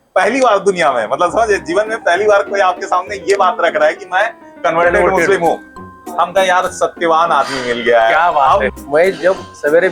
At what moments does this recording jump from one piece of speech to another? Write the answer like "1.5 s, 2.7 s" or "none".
8.7 s

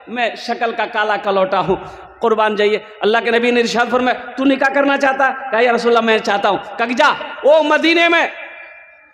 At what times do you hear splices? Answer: none

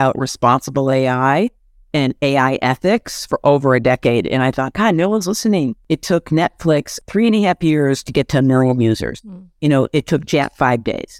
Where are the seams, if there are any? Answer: 5.8 s, 6.9 s

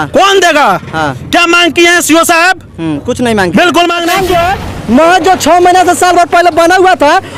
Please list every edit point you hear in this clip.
4.0 s

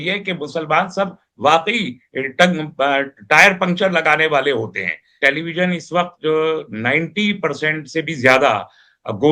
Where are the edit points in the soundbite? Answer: 5.2 s

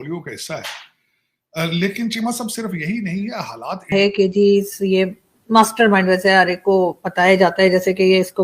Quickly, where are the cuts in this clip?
3.9 s

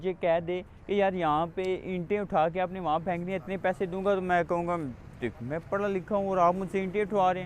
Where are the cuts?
none

